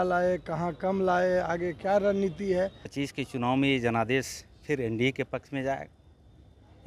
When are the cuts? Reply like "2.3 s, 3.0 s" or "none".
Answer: 2.8 s

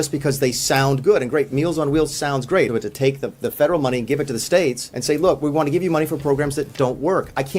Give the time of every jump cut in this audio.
2.7 s, 4.9 s

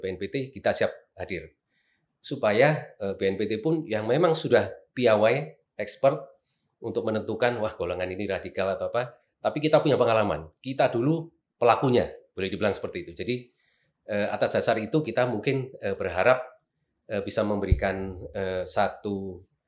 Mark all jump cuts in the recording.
none

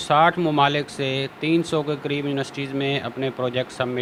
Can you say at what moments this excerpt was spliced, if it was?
none

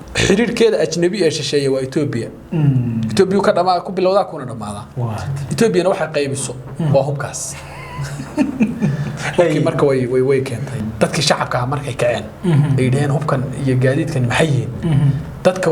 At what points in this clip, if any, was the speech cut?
10.9 s

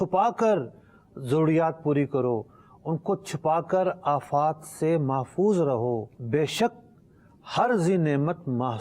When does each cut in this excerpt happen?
6.1 s

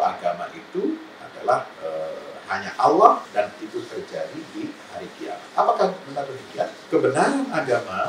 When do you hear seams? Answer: 1.7 s, 3.3 s, 6.8 s

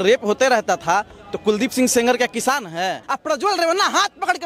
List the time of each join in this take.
3.1 s

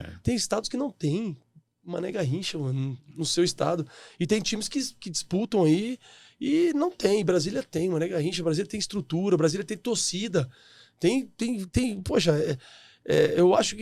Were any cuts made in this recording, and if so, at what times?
none

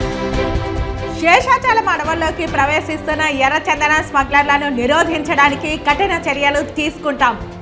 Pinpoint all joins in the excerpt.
1.2 s

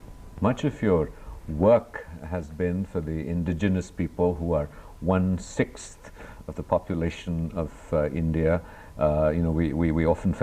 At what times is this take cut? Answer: 2.1 s

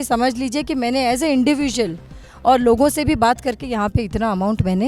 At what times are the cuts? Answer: none

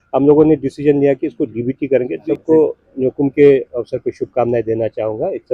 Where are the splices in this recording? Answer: 2.2 s

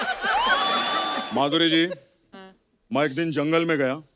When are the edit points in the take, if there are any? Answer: 1.1 s

